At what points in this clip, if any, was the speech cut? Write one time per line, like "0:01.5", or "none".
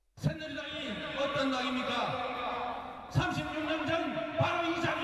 0:02.7